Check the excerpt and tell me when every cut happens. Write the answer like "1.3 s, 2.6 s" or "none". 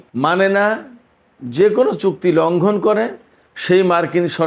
none